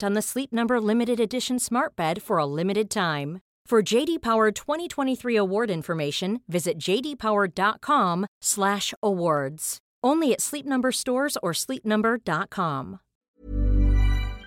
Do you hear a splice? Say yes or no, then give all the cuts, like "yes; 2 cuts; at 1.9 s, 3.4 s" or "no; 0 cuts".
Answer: yes; 1 cut; at 13.2 s